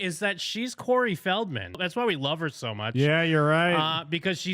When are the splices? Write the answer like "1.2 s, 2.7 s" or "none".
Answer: 1.8 s